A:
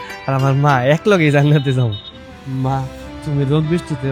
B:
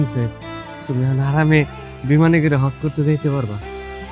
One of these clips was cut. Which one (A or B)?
A